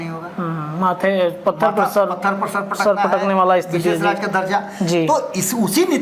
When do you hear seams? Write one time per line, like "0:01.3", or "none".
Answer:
none